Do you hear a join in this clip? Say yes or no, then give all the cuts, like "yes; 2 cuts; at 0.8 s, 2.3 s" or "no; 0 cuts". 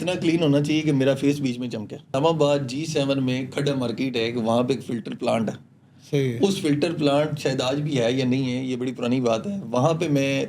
yes; 1 cut; at 2.2 s